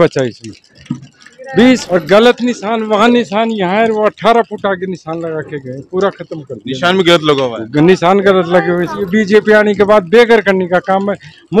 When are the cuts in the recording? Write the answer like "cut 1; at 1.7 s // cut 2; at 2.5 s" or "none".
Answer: cut 1; at 1.8 s // cut 2; at 9.0 s